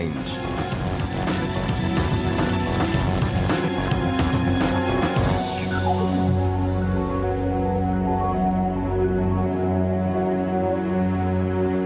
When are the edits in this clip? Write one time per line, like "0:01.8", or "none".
0:05.6